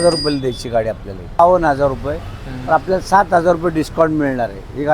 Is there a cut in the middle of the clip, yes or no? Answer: yes